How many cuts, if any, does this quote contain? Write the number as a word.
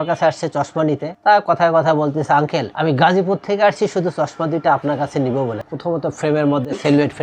three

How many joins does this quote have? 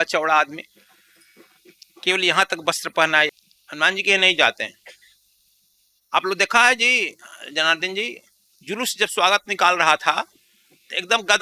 one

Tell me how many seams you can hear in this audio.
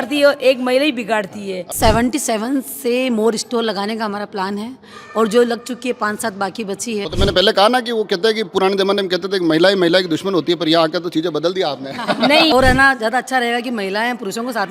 three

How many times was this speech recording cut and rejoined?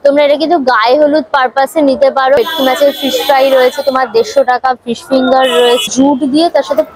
two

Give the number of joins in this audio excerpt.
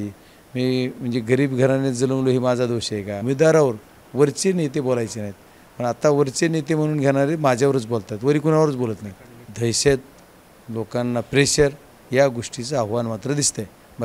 two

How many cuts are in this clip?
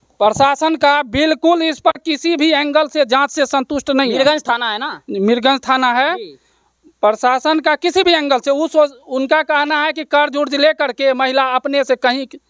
zero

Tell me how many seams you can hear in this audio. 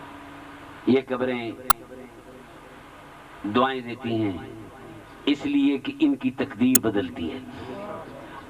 one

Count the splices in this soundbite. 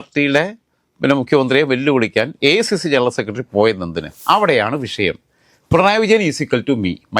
one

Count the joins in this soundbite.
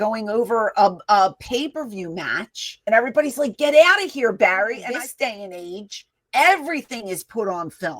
two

